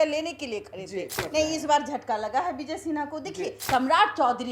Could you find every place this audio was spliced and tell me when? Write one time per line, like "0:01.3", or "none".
0:01.3
0:03.6